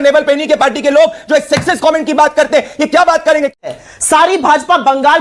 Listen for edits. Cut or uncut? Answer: cut